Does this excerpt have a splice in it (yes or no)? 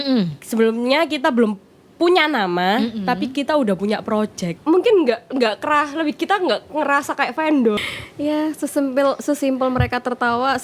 yes